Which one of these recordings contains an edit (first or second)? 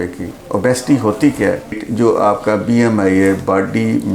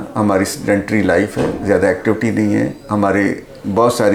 first